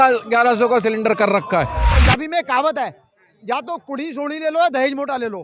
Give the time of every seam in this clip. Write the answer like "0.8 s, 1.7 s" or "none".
1.9 s